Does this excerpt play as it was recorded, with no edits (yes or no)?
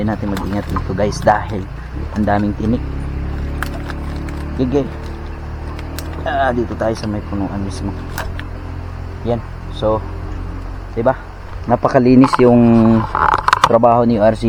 yes